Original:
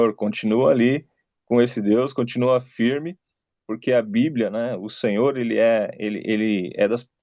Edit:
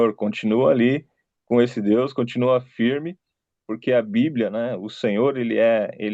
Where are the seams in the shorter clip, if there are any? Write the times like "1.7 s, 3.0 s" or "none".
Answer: none